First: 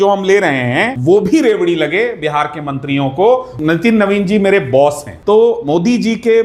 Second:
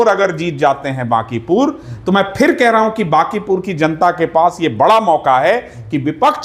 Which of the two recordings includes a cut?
first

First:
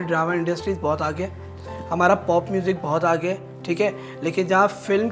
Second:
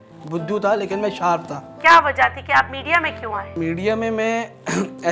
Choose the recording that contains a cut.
second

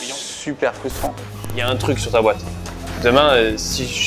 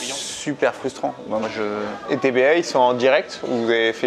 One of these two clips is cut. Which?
first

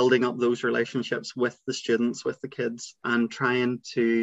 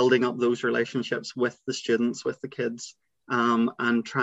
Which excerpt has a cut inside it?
first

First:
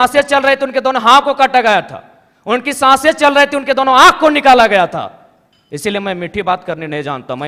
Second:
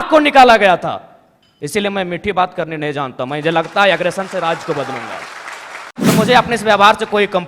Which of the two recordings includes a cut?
second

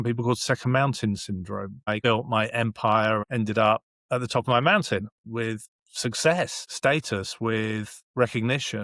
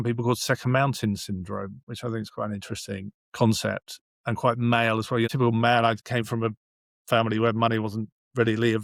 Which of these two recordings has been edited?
first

